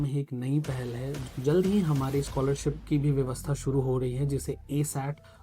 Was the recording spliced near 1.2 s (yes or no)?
yes